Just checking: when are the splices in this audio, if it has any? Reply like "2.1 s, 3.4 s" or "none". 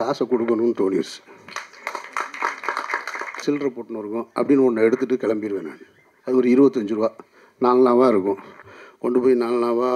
3.4 s

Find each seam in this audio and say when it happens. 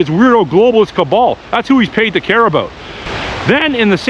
3.0 s

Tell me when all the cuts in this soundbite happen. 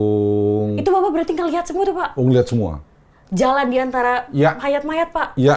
none

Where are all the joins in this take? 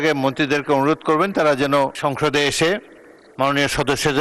2.0 s

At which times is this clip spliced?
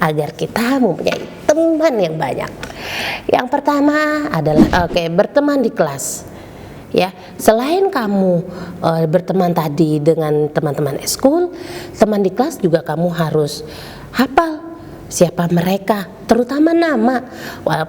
4.7 s

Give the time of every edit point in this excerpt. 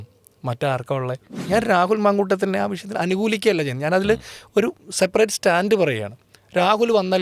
1.3 s

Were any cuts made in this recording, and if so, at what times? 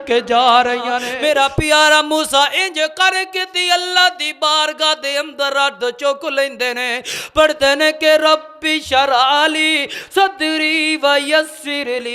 1.1 s

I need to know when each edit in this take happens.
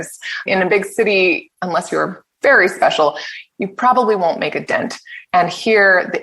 1.5 s

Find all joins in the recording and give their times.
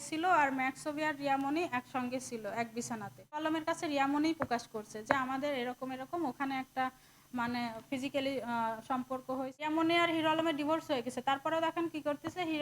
3.4 s, 9.7 s

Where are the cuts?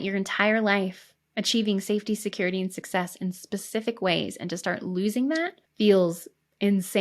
5.6 s

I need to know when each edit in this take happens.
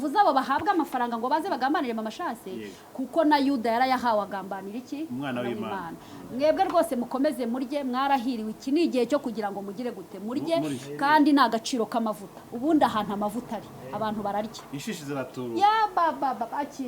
none

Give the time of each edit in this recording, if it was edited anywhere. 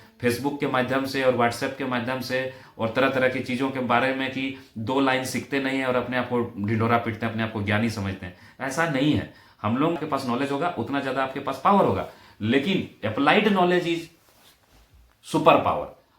10.0 s

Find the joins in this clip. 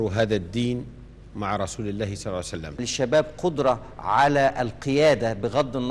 2.9 s

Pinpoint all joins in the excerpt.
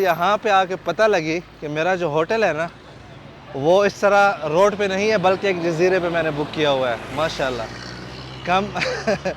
none

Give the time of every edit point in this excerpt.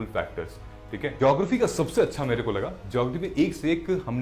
1.1 s

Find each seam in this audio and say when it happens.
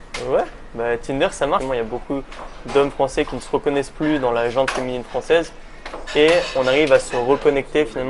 1.6 s

